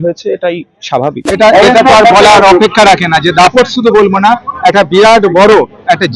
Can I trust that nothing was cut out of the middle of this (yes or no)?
no